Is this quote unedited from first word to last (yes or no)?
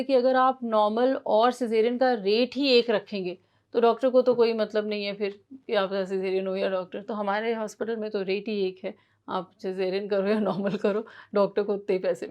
yes